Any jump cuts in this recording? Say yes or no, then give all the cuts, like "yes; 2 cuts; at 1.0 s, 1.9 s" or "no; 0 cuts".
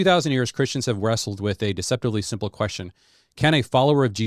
no; 0 cuts